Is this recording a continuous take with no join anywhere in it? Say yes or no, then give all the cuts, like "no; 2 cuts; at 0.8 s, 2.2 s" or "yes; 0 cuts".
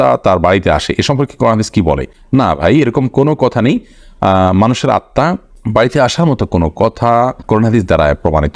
yes; 0 cuts